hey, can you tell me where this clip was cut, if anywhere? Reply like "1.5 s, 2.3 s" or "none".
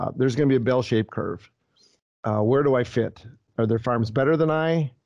3.5 s